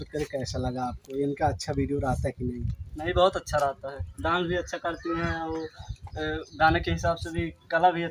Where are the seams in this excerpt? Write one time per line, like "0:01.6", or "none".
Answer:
none